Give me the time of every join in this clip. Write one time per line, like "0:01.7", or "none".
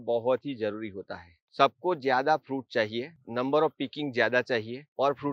0:01.4